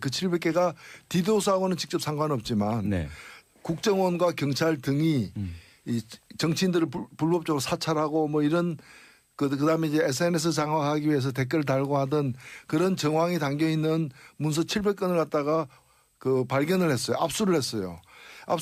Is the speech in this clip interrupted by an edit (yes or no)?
no